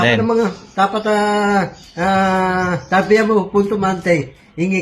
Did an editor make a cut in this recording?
no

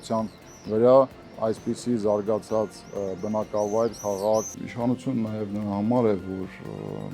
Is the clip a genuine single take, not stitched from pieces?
no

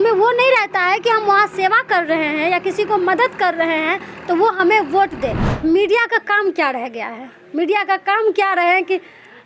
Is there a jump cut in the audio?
yes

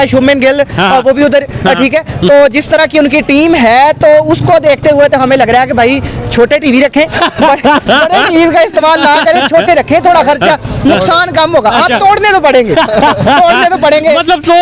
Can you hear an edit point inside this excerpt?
no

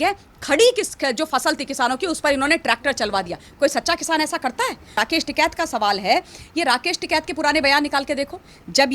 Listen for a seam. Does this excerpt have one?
yes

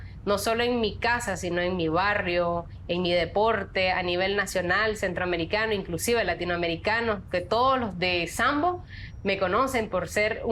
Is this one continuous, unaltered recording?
yes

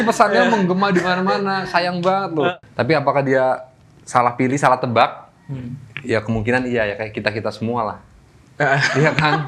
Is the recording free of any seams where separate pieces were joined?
no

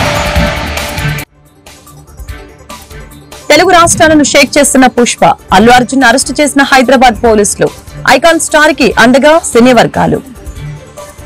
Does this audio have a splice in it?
no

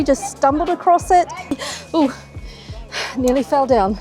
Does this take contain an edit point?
yes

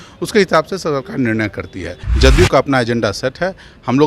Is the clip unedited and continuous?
no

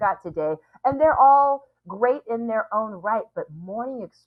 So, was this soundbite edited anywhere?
no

